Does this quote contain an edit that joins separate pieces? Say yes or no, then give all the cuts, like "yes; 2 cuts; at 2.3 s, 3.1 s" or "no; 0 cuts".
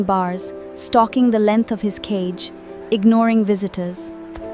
no; 0 cuts